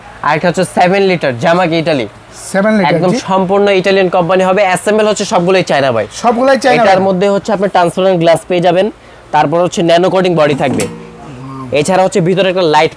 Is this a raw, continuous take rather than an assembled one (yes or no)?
yes